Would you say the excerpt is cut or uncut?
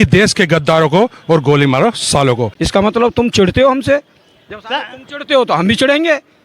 cut